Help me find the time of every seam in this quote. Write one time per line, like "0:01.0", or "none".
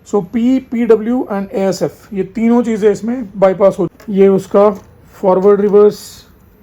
0:04.0